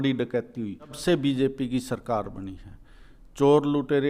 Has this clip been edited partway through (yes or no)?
yes